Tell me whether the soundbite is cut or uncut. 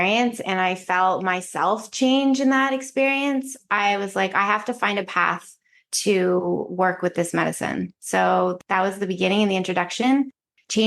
cut